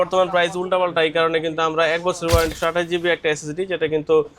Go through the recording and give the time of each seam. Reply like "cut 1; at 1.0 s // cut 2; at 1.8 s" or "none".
cut 1; at 2.5 s